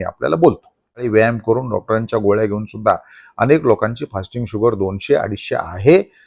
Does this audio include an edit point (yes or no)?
yes